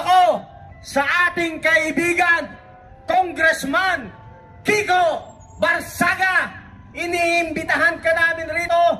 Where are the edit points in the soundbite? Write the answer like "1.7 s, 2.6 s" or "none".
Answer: none